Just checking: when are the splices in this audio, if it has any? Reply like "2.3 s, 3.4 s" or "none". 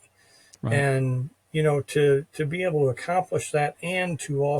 none